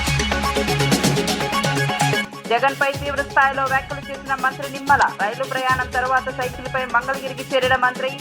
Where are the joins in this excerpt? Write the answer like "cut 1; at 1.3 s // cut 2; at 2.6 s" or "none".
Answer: cut 1; at 0.9 s // cut 2; at 2.3 s